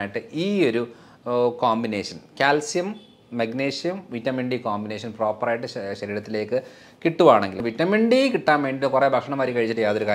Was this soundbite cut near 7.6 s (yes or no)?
yes